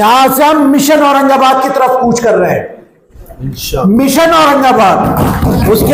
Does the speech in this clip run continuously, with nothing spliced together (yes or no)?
yes